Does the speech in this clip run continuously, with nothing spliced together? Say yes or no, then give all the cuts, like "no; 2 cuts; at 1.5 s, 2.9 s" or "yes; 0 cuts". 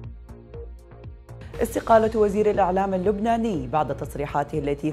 no; 1 cut; at 1.6 s